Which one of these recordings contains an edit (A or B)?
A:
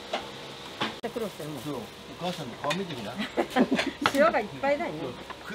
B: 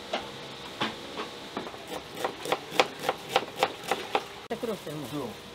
A